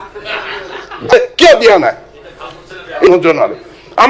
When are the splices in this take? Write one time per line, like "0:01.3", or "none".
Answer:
0:01.1
0:03.1